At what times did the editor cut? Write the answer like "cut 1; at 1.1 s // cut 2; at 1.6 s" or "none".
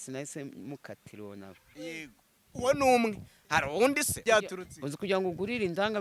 cut 1; at 4.1 s

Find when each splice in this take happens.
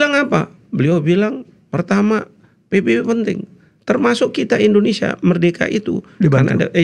none

